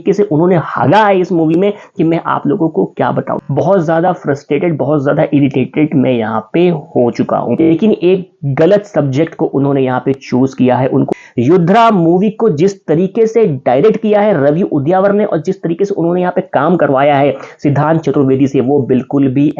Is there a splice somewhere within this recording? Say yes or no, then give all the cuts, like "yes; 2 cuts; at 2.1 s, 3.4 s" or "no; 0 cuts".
yes; 3 cuts; at 3.4 s, 7.6 s, 11.1 s